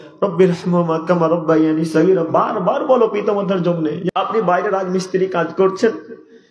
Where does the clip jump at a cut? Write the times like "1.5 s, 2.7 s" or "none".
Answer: 4.1 s